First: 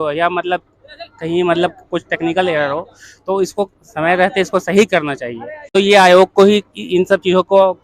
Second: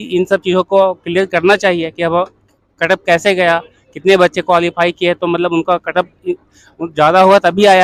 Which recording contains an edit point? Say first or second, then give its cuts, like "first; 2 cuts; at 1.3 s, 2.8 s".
first; 1 cut; at 5.7 s